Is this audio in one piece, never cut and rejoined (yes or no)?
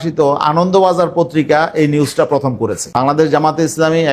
no